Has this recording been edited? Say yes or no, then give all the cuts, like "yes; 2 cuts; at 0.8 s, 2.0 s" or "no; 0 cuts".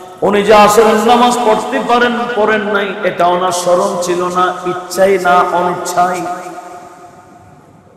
no; 0 cuts